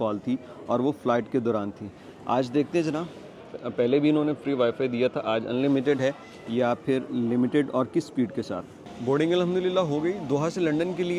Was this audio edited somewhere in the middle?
no; 0 cuts

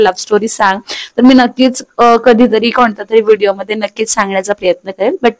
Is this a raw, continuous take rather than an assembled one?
yes; 0 cuts

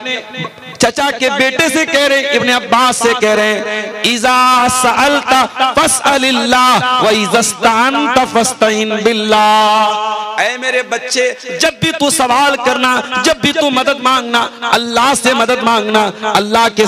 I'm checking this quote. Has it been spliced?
no; 0 cuts

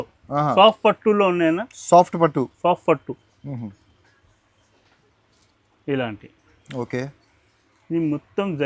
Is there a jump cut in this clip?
no; 0 cuts

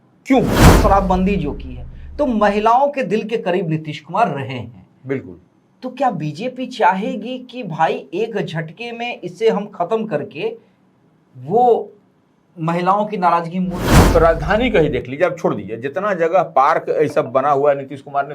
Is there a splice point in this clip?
yes; 2 cuts; at 0.8 s, 14.0 s

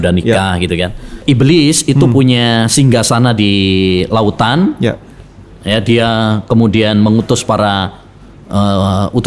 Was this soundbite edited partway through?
yes; 1 cut; at 1.2 s

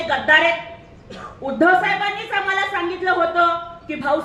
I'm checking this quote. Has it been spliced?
no; 0 cuts

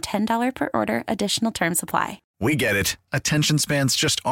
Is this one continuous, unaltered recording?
no; 1 cut; at 2.2 s

